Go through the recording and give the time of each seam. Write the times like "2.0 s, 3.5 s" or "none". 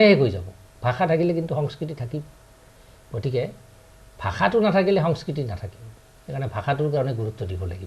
none